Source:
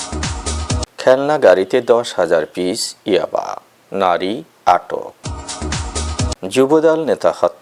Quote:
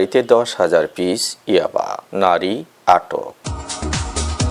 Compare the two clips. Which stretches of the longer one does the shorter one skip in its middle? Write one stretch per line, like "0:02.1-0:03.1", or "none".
0:03.6-0:03.8